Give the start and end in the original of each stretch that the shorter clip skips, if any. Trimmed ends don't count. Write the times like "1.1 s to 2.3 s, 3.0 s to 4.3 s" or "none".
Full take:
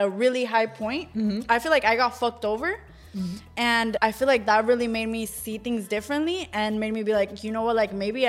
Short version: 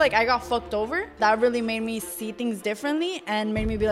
2.9 s to 4.4 s